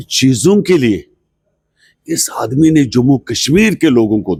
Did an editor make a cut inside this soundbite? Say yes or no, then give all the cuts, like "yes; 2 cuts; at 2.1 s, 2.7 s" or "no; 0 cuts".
no; 0 cuts